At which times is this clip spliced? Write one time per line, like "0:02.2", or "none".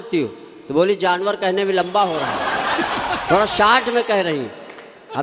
none